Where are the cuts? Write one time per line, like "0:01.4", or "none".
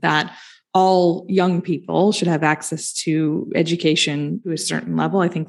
0:04.4